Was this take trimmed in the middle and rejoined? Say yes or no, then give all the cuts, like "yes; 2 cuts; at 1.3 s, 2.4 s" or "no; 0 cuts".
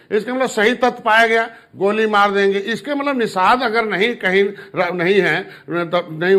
no; 0 cuts